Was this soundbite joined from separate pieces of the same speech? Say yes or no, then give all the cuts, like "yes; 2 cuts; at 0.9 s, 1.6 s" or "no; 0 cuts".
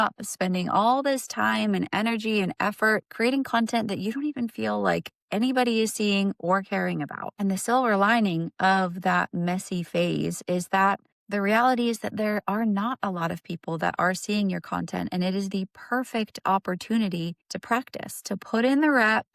yes; 2 cuts; at 11.1 s, 17.5 s